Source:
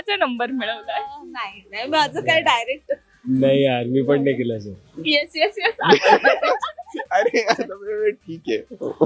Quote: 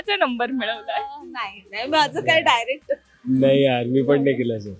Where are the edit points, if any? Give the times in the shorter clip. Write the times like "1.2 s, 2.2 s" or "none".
none